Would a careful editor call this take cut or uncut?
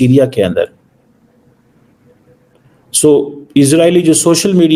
uncut